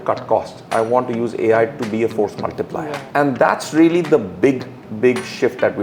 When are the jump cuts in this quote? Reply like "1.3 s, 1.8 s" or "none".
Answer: 3.0 s